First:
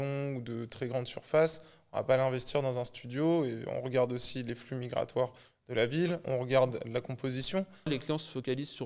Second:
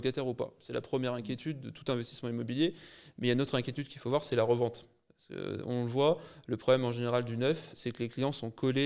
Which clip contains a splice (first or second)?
first